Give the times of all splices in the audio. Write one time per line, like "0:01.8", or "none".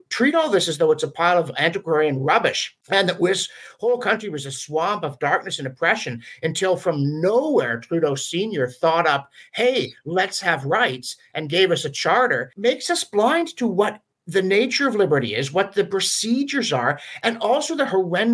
0:02.7
0:12.5